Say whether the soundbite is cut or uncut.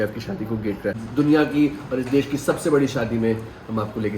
cut